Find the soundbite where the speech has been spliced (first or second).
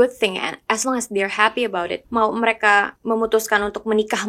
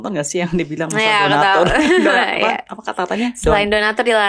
first